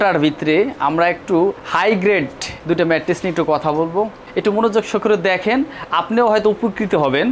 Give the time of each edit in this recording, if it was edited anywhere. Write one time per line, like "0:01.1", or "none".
none

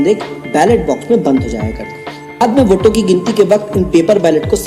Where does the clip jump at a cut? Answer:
0:02.4

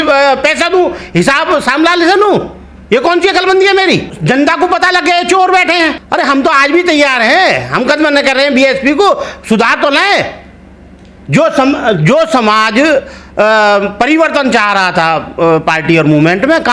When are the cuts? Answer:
0:04.1
0:06.0

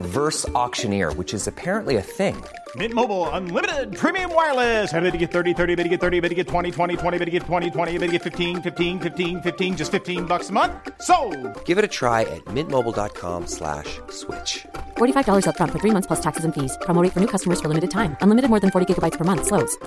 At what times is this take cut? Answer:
none

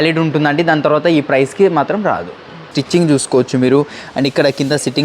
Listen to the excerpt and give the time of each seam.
0:02.8

